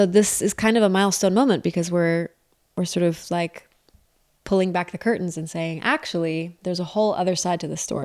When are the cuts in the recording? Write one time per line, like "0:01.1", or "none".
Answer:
none